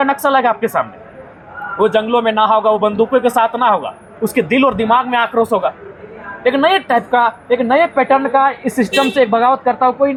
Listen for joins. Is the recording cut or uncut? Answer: uncut